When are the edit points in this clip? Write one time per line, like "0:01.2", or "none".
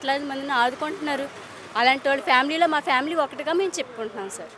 none